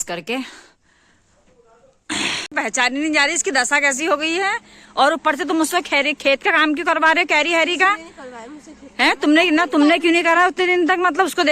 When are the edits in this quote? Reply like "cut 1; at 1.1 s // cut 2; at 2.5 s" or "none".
cut 1; at 2.5 s